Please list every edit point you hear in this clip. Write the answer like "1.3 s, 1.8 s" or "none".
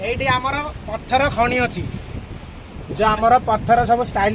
none

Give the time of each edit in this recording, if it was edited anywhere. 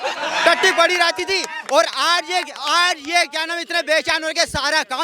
none

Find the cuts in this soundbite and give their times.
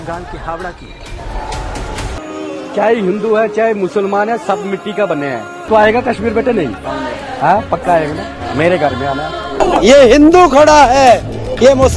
2.3 s, 5.5 s, 9.6 s

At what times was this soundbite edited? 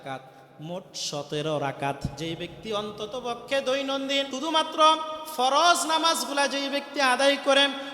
2.1 s, 4.3 s

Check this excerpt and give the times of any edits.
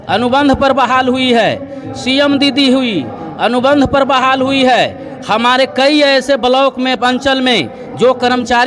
none

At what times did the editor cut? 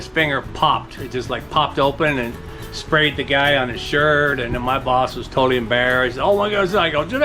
none

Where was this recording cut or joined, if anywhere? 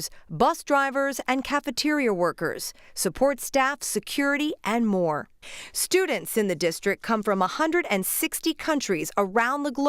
8.8 s

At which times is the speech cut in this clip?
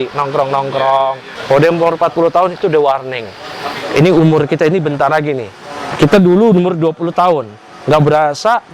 1.3 s

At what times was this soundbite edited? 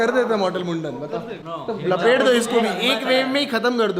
none

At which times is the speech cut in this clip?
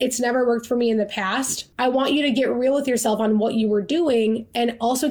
1.6 s

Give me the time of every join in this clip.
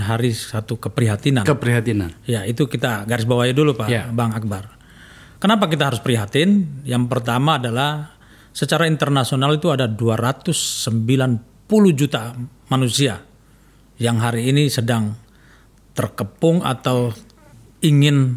none

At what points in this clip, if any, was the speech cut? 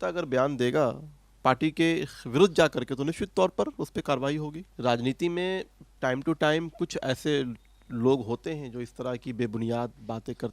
4.7 s

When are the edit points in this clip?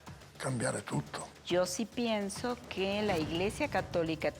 1.3 s

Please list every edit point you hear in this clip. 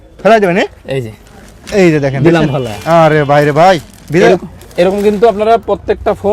none

